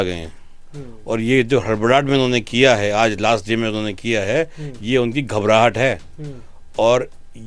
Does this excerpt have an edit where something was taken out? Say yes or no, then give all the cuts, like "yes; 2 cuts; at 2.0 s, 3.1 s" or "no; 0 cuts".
no; 0 cuts